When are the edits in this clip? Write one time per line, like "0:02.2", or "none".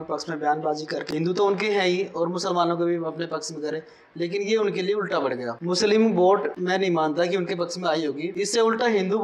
0:01.0
0:05.5
0:06.5
0:08.3